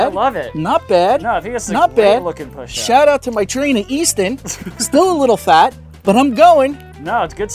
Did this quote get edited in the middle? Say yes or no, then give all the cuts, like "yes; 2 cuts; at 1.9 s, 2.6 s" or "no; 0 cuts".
no; 0 cuts